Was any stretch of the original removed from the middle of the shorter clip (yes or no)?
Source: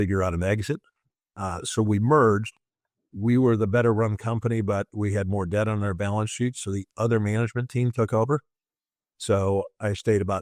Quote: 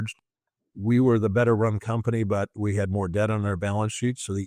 no